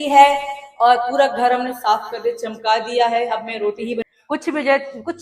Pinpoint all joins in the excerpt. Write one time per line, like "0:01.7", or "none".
0:04.0